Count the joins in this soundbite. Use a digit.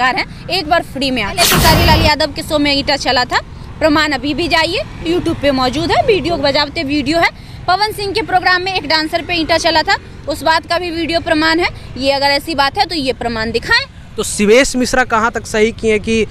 1